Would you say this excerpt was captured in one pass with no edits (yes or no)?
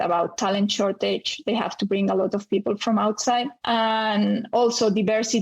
no